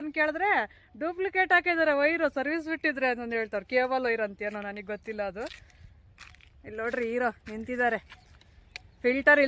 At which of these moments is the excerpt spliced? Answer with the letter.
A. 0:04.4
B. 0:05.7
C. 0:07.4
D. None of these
D